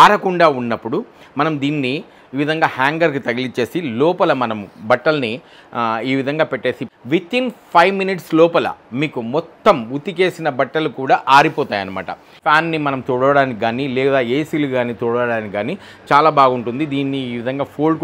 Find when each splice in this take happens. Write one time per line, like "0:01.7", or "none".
0:06.9
0:12.4